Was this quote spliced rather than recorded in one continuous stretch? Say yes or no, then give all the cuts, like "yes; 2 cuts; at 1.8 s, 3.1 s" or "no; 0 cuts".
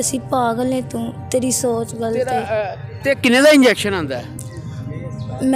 no; 0 cuts